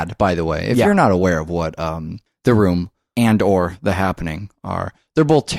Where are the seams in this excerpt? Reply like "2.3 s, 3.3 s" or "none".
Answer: none